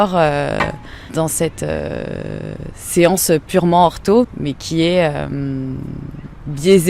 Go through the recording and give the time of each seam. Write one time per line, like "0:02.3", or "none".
0:01.1
0:04.2